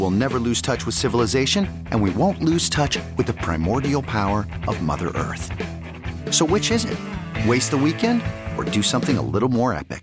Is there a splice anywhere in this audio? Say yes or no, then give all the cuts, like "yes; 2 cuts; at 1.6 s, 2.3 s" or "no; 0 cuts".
no; 0 cuts